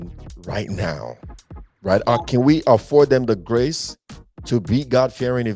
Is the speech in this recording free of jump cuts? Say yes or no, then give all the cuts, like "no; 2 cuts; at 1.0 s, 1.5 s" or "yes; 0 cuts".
yes; 0 cuts